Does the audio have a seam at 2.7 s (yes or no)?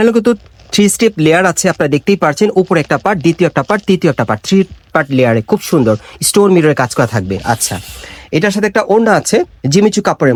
no